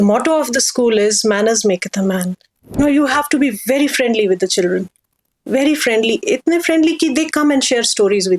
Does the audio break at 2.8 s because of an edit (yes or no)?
yes